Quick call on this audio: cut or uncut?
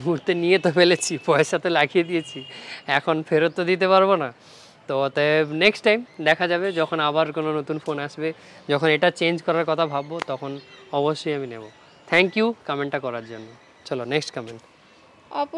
uncut